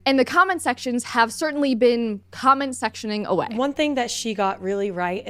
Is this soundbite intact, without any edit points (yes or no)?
no